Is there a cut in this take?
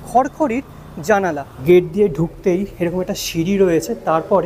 yes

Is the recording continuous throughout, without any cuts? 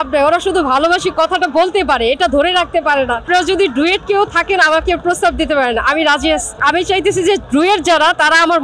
no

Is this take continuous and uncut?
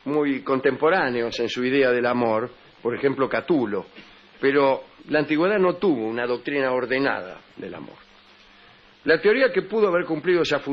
yes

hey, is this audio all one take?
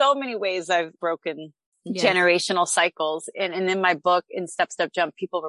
yes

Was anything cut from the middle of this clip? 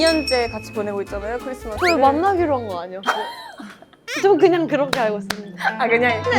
no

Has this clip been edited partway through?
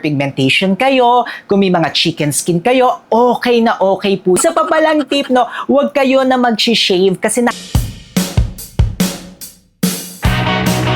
yes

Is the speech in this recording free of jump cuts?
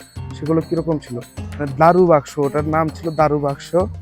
no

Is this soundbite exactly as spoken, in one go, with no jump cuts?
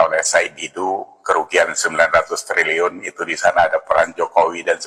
yes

